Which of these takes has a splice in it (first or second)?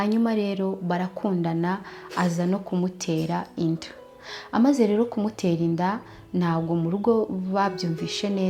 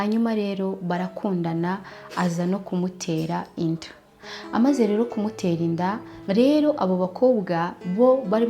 second